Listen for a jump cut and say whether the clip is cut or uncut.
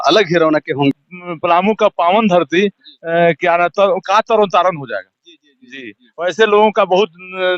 cut